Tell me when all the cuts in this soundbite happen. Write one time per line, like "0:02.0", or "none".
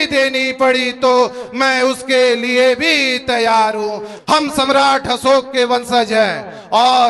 0:04.1

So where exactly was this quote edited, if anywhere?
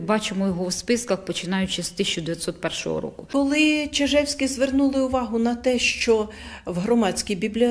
0:03.2

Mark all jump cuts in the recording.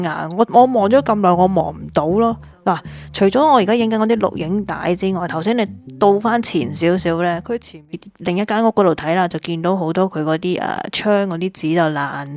0:07.9

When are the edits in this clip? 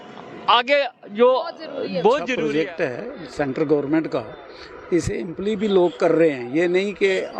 0:02.4

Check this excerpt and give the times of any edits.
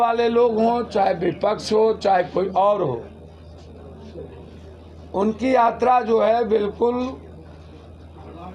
none

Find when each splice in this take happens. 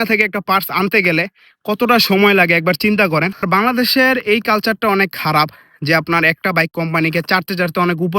0:03.6

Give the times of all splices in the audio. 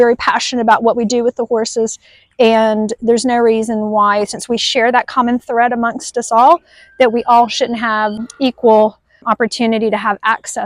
0:08.2
0:09.2

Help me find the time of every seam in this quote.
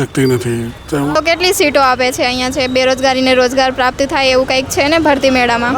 0:01.1

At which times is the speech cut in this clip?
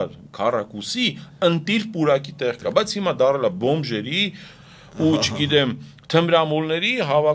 none

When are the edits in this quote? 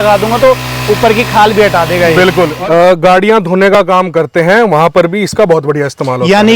0:02.5

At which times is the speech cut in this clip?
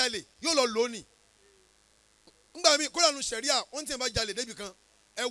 none

